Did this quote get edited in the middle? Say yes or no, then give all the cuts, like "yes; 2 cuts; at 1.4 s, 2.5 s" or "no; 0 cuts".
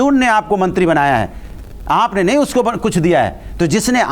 no; 0 cuts